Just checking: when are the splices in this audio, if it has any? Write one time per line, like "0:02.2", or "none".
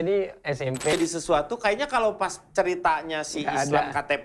0:00.9